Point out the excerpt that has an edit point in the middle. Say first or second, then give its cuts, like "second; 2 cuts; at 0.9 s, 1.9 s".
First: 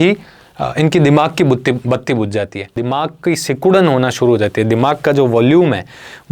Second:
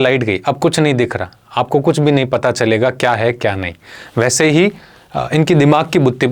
first; 1 cut; at 2.8 s